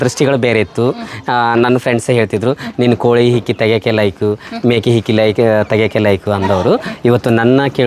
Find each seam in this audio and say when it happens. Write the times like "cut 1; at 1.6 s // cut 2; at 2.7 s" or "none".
none